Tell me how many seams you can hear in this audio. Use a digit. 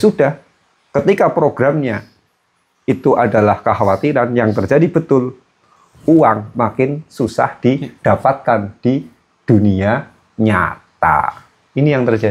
0